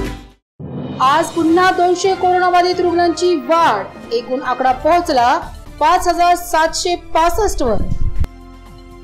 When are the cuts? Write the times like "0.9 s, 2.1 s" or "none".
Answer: 1.0 s